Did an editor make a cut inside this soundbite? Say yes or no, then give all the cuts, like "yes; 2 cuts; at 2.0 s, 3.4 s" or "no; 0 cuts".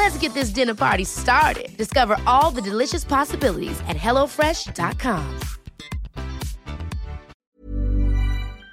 yes; 1 cut; at 7.3 s